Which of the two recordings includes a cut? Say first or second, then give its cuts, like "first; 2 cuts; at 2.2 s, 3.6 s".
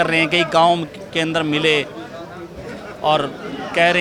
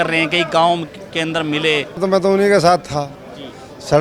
second; 1 cut; at 2.0 s